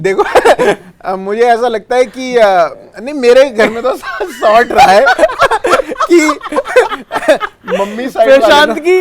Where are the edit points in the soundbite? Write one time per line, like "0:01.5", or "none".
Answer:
none

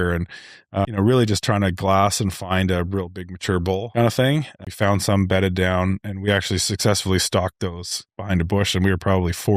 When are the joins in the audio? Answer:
0:00.9
0:03.9
0:04.5

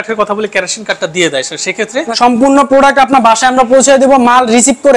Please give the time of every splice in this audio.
0:02.0

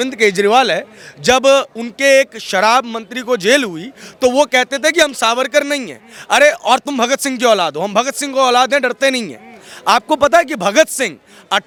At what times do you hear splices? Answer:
none

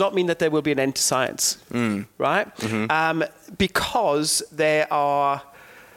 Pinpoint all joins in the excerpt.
none

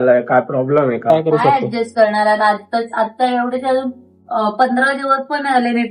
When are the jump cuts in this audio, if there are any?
0:01.1

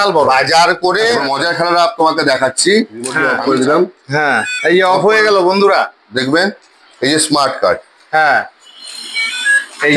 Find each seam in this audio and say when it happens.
0:01.3
0:03.3

